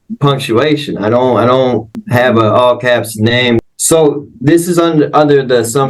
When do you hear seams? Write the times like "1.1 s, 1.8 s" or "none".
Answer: 2.1 s, 3.6 s